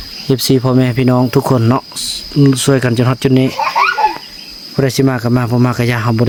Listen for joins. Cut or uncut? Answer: uncut